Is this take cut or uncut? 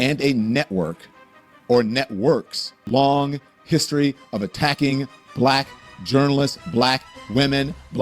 cut